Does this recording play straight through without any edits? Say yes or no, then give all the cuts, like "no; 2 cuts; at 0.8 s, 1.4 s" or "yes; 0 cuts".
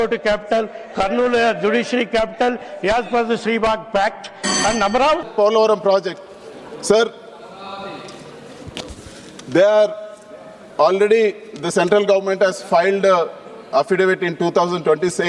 no; 1 cut; at 5.2 s